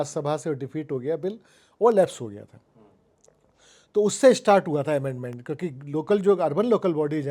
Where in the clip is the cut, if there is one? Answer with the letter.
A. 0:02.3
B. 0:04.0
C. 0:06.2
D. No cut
D